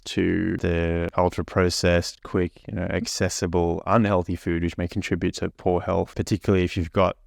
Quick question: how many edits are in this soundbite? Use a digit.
3